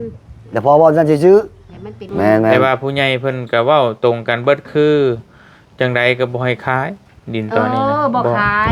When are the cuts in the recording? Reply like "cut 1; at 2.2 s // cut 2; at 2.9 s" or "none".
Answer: cut 1; at 2.0 s